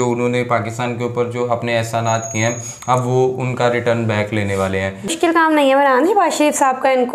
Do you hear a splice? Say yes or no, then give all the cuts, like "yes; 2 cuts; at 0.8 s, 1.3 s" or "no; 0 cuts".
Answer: yes; 1 cut; at 5.1 s